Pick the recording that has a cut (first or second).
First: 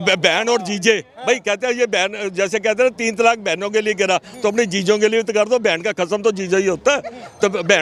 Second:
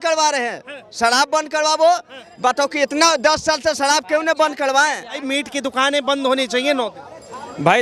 second